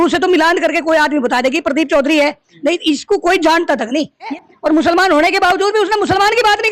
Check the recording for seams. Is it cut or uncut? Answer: cut